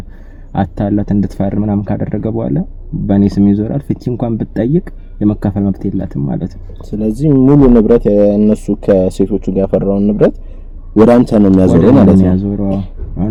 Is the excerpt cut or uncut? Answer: uncut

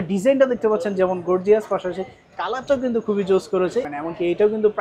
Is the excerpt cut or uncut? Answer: cut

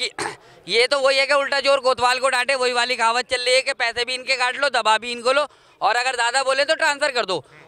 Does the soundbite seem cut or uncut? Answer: uncut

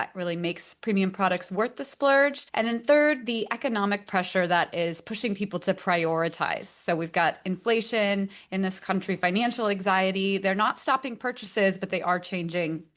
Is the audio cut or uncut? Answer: uncut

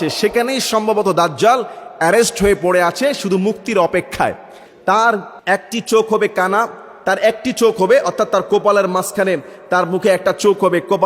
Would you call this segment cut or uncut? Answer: cut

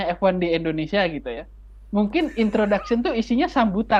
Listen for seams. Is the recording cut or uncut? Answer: uncut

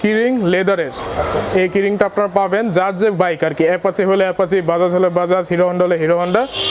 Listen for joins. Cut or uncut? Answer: uncut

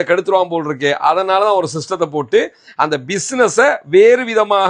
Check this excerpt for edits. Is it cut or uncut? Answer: uncut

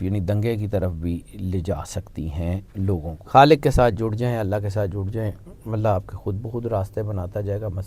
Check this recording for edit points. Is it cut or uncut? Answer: cut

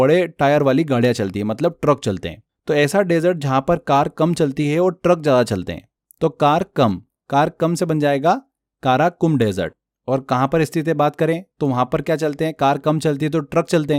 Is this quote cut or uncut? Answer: uncut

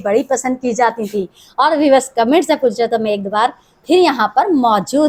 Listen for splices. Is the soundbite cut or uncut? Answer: uncut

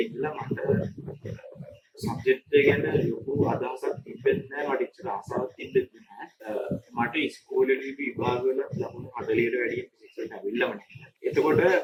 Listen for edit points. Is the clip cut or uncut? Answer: uncut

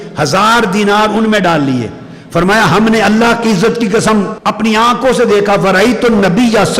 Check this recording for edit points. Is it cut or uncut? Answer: cut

